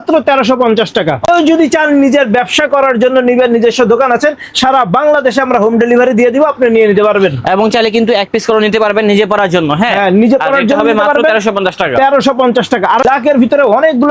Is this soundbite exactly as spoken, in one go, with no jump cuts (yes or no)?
no